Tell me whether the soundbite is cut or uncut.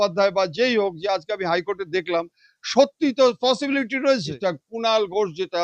cut